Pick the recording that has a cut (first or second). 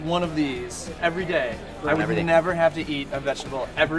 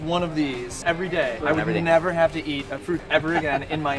second